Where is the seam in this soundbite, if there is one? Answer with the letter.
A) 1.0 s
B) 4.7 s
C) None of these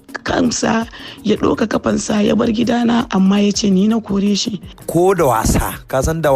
B